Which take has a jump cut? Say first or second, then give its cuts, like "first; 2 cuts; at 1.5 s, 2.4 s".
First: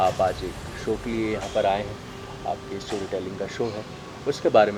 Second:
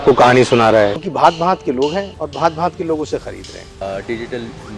second; 3 cuts; at 1.0 s, 2.2 s, 3.8 s